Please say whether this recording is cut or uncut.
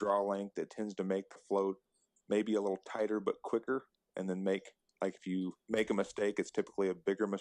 uncut